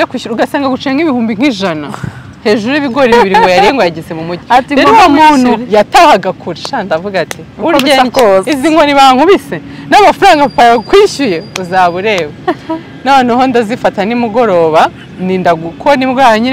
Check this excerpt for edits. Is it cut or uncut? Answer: uncut